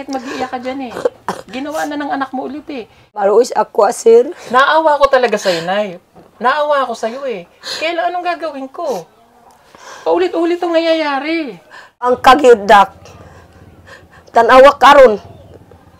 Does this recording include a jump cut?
yes; 2 cuts; at 3.2 s, 12.2 s

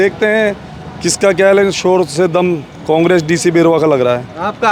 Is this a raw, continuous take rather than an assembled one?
yes; 0 cuts

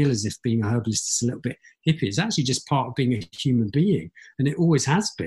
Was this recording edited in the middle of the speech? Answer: no; 0 cuts

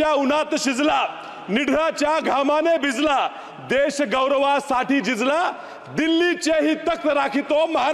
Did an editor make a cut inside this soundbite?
no; 0 cuts

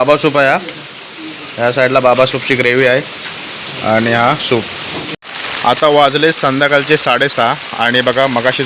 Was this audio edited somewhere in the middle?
yes; 1 cut; at 5.1 s

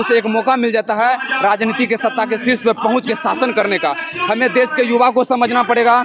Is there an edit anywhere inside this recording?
no; 0 cuts

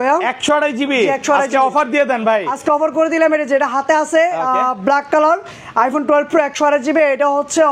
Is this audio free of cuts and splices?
yes; 0 cuts

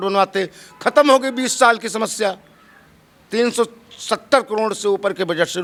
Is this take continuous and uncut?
yes; 0 cuts

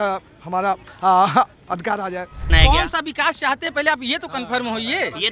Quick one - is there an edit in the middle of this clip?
yes; 1 cut; at 2.5 s

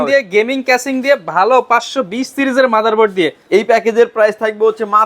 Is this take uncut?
no; 1 cut; at 3.4 s

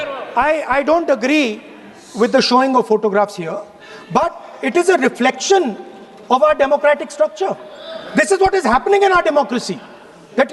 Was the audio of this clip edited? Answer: no; 0 cuts

